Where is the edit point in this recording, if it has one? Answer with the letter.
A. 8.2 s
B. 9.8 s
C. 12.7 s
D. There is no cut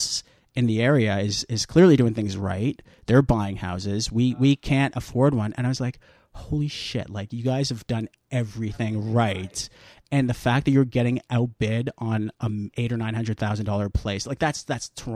C